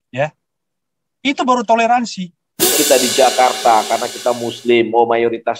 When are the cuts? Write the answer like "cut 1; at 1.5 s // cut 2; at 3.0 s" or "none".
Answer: cut 1; at 2.7 s